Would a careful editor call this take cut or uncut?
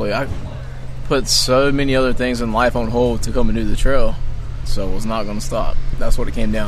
cut